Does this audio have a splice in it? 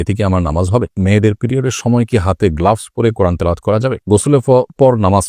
yes; 2 cuts; at 1.0 s, 4.1 s

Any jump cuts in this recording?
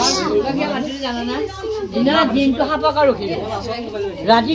no; 0 cuts

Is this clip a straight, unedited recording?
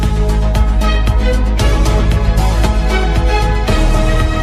yes; 0 cuts

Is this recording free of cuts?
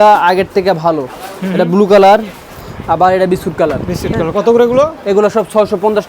yes; 0 cuts

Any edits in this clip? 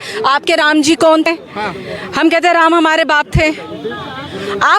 yes; 1 cut; at 1.3 s

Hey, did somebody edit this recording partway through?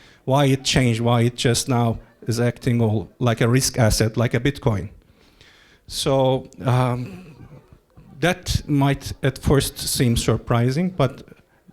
no; 0 cuts

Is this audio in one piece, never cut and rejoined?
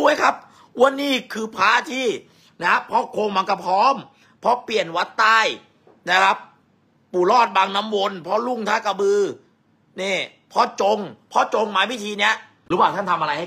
no; 1 cut; at 12.5 s

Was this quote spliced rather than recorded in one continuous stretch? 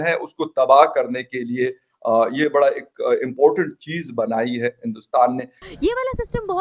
yes; 1 cut; at 5.6 s

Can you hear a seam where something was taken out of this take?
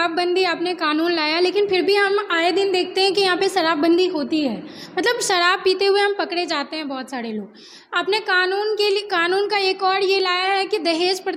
no; 0 cuts

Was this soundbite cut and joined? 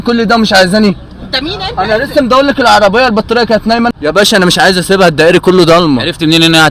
yes; 2 cuts; at 1.1 s, 6.0 s

